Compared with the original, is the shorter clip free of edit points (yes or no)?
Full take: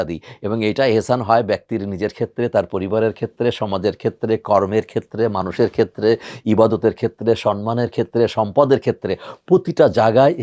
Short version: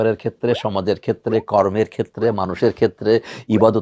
yes